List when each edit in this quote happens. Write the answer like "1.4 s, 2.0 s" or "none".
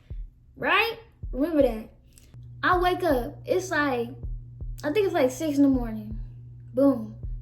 2.1 s